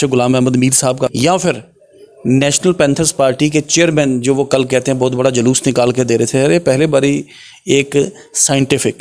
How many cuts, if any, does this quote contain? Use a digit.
1